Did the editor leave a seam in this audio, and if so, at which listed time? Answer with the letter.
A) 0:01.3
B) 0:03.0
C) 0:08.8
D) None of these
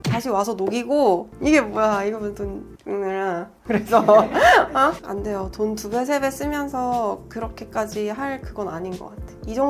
A